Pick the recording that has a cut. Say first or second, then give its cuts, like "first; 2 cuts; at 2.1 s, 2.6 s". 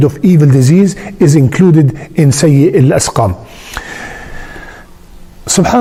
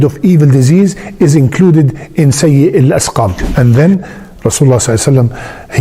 second; 1 cut; at 3.6 s